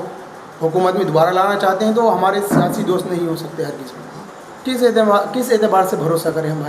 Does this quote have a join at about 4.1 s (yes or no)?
yes